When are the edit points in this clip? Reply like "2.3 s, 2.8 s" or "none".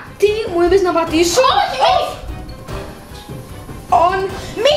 none